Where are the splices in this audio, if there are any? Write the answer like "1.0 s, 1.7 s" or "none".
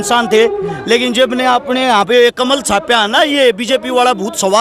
none